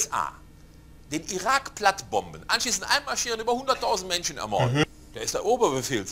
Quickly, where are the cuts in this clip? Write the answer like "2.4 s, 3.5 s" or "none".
4.8 s